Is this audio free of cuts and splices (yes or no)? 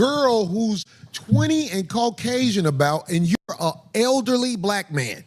no